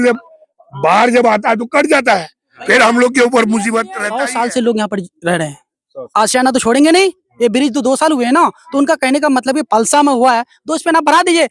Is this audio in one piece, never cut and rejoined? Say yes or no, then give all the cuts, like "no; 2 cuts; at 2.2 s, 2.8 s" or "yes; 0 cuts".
no; 1 cut; at 4.0 s